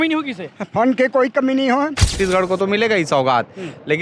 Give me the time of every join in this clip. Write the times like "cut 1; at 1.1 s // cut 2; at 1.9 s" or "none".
cut 1; at 2.1 s